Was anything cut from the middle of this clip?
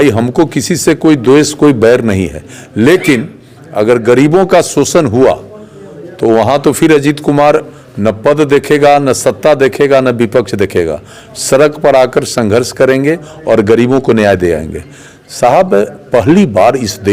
no; 0 cuts

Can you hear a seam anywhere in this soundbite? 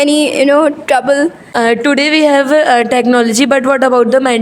yes; 1 cut; at 1.4 s

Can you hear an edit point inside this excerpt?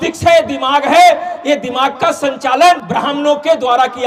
yes; 1 cut; at 2.8 s

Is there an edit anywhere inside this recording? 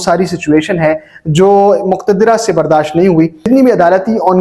yes; 1 cut; at 3.5 s

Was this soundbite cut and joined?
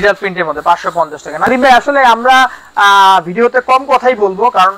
no; 0 cuts

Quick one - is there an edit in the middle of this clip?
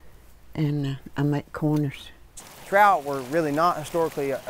yes; 1 cut; at 2.5 s

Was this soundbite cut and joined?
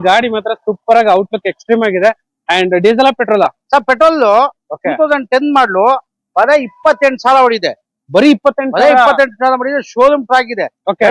no; 0 cuts

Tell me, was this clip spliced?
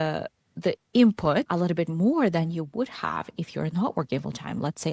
no; 0 cuts

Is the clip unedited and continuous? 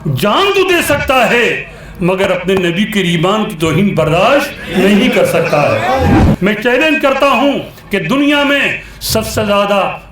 no; 1 cut; at 6.1 s

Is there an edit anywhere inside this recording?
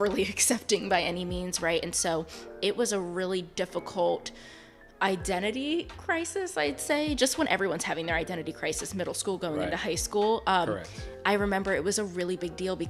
no; 0 cuts

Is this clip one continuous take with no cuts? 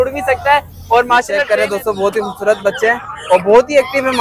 no; 1 cut; at 1.4 s

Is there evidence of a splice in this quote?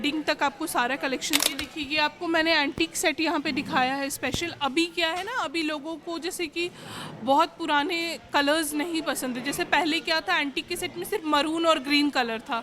yes; 1 cut; at 1.5 s

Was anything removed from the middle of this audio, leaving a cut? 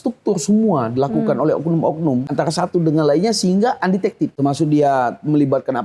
yes; 2 cuts; at 2.3 s, 4.3 s

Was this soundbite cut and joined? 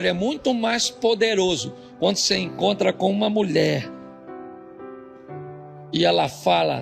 no; 0 cuts

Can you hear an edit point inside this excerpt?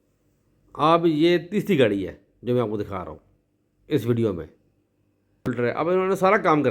yes; 1 cut; at 5.4 s

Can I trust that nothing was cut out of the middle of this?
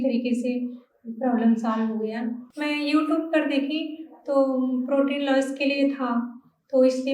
no; 1 cut; at 2.4 s

